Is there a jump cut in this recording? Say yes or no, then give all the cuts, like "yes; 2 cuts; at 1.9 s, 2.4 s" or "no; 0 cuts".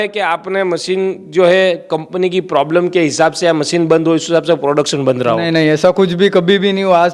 no; 0 cuts